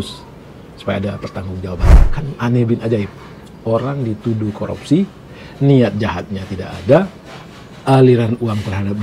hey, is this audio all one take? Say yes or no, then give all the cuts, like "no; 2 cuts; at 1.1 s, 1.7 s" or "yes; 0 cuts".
no; 1 cut; at 2.1 s